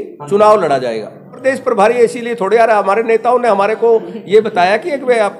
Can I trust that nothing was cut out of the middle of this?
no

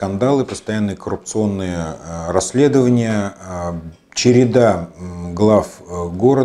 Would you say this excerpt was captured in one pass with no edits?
yes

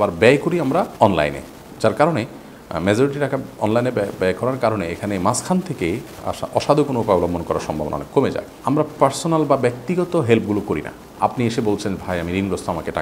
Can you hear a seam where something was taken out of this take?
yes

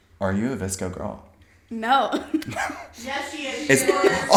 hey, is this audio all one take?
yes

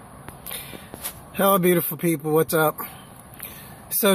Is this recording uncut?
yes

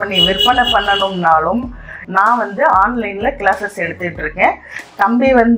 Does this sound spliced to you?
yes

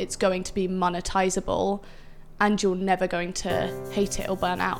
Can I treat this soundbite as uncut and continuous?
no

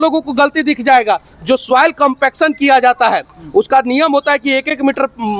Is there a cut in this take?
no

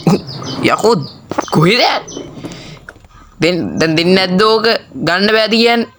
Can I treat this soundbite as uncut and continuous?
yes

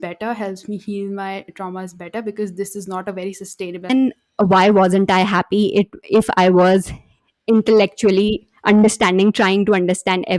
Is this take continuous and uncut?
no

